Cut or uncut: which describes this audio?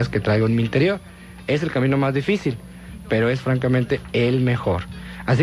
cut